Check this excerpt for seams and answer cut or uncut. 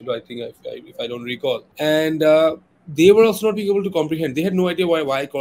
cut